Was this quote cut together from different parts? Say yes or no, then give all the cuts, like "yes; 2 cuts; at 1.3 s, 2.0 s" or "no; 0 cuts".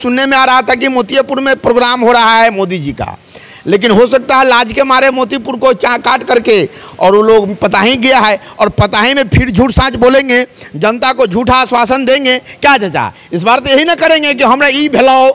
no; 0 cuts